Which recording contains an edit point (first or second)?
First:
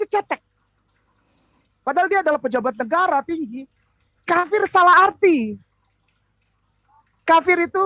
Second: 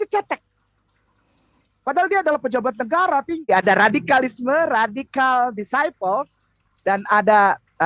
second